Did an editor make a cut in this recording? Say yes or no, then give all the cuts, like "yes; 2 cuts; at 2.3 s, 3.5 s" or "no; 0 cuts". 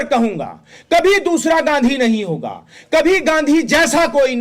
no; 0 cuts